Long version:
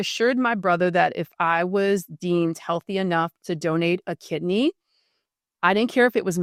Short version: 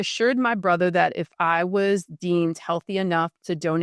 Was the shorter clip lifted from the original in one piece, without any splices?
yes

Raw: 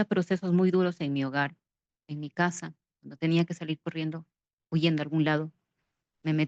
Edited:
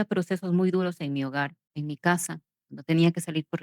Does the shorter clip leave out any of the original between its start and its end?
yes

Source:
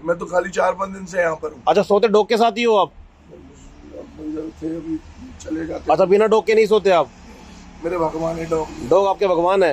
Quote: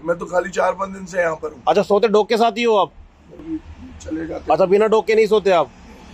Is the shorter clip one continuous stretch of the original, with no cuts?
no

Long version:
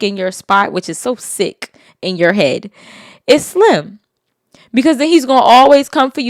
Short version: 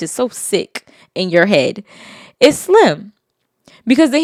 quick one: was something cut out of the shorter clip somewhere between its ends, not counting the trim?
no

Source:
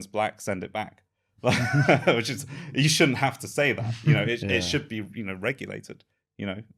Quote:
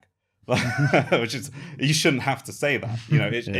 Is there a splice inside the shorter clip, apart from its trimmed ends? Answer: no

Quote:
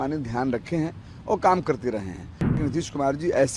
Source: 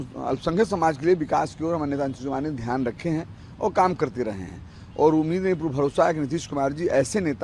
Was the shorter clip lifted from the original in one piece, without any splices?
no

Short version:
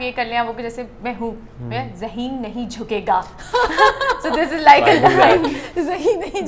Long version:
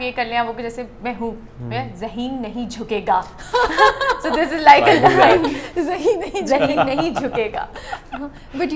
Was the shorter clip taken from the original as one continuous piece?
yes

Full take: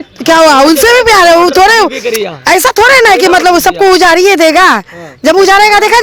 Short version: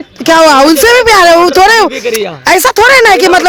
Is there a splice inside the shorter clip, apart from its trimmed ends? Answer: no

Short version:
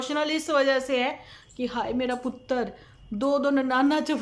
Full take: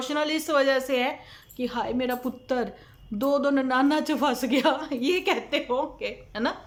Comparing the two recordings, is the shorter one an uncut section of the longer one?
yes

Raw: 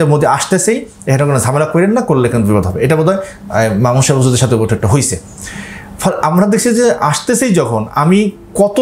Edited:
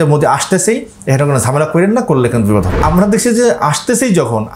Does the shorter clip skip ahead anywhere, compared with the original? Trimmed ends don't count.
yes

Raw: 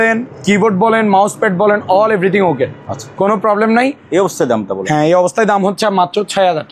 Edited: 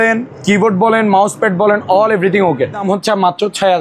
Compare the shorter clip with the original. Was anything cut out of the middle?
yes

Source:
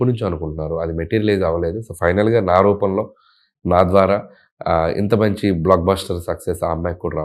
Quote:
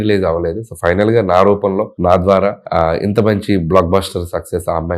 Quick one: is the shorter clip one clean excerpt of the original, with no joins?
no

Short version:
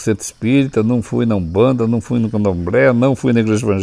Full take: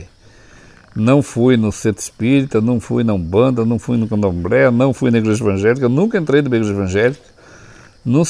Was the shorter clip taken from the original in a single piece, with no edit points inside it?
yes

